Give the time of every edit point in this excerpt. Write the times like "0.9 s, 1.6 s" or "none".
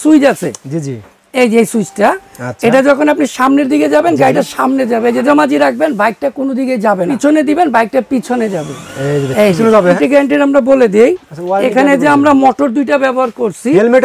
5.2 s, 7.1 s, 10.0 s